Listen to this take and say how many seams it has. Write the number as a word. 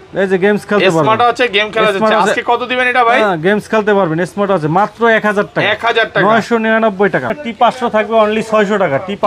one